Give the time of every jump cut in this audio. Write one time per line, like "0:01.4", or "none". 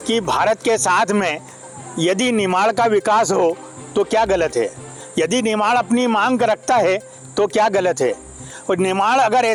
none